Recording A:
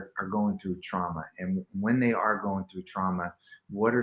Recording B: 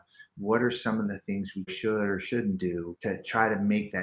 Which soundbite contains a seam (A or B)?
B